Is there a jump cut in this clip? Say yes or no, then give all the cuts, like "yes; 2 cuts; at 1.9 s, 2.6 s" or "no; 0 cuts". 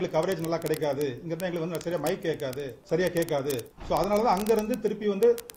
yes; 2 cuts; at 2.7 s, 3.7 s